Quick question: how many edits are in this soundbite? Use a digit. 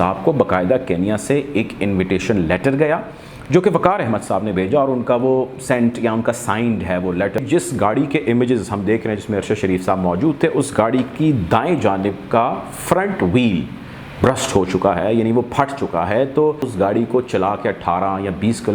2